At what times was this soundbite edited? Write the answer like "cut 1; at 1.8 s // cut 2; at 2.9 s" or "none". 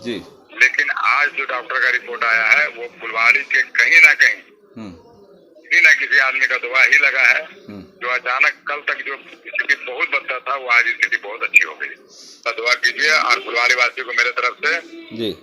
cut 1; at 12.5 s